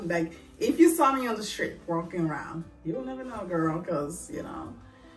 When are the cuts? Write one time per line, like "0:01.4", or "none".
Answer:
none